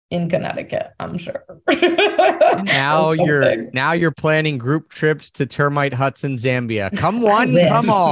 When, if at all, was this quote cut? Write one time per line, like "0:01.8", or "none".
none